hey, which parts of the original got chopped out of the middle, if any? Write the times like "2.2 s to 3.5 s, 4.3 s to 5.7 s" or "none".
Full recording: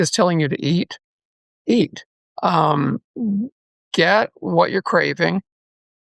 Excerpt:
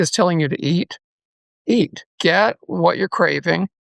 2.0 s to 3.8 s

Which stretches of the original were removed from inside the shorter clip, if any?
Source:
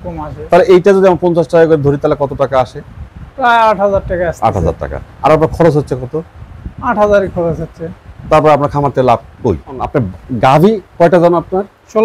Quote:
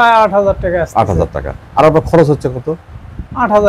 none

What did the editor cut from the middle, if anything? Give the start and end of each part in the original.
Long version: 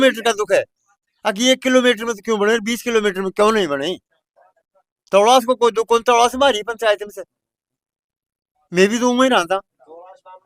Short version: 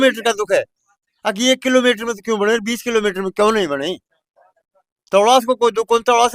none

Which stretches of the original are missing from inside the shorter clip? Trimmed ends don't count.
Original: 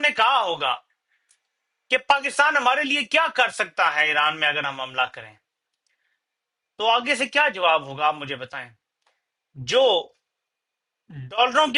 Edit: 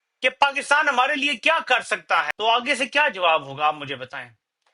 4.0 s to 6.7 s

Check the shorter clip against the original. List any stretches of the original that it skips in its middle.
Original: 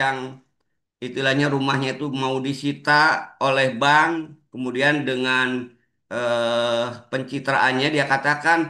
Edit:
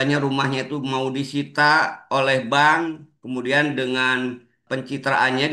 5.9 s to 7.0 s

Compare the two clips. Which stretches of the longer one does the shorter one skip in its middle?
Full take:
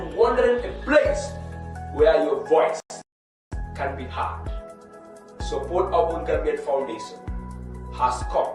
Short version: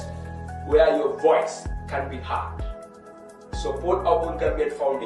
3.0 s to 3.6 s

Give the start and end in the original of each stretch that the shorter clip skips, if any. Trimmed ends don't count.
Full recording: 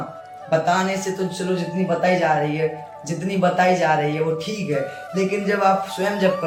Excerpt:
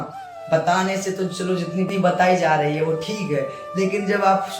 1.9 s to 3.3 s

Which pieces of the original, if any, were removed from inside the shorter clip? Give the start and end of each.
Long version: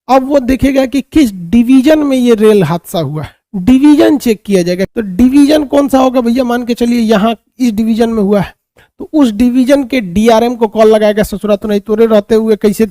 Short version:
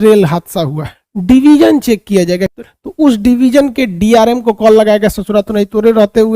5.0 s to 8.7 s

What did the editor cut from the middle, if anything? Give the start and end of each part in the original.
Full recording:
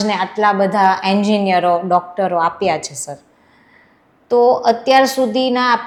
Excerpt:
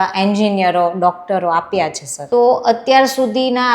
3.0 s to 4.1 s

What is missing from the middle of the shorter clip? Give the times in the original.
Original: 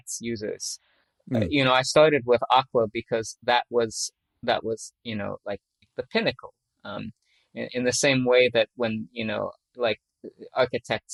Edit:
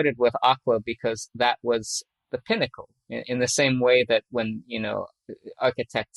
4.2 s to 5.7 s, 6.5 s to 7.3 s, 9.6 s to 10.1 s

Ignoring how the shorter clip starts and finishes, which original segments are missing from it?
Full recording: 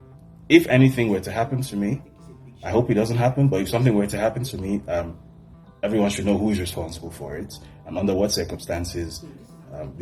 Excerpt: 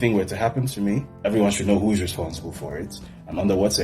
2.0 s to 5.7 s

